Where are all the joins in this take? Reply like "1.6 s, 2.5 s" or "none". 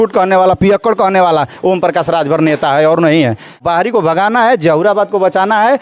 3.6 s